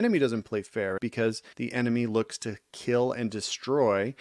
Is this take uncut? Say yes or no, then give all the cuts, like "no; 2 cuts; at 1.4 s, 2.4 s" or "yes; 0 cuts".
no; 1 cut; at 1.1 s